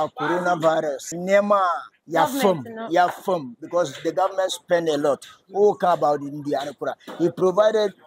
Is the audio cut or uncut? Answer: cut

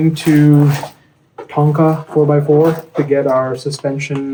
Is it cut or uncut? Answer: uncut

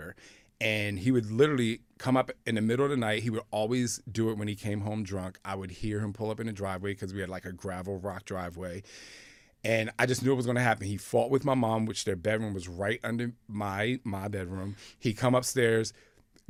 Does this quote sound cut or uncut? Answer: uncut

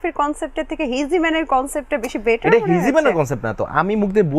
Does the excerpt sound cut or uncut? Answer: uncut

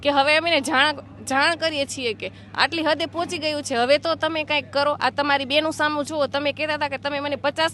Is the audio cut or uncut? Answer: uncut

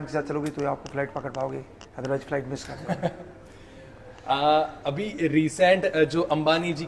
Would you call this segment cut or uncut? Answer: uncut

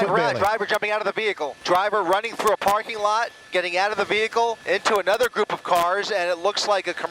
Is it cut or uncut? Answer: cut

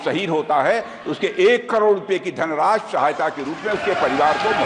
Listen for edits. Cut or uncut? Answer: uncut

